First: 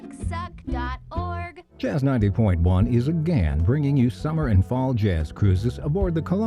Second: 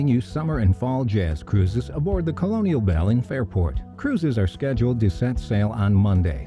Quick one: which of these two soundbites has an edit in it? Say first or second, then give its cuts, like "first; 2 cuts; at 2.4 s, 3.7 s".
first; 1 cut; at 1.6 s